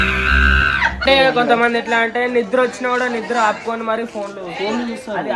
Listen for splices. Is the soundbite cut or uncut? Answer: cut